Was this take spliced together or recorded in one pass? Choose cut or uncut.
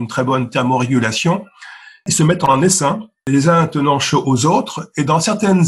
cut